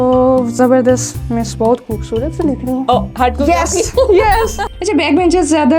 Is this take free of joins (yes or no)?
no